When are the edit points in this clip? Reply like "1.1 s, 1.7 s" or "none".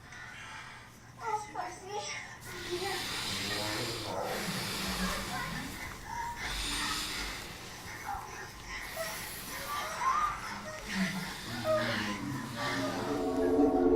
9.1 s